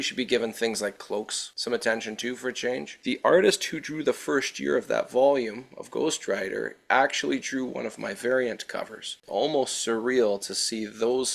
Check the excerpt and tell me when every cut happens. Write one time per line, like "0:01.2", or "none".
0:03.0
0:09.1